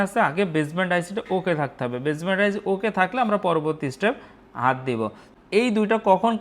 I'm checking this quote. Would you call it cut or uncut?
cut